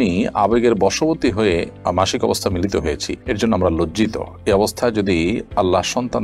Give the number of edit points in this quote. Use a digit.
0